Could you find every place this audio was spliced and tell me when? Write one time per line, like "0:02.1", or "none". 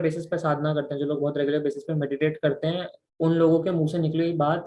none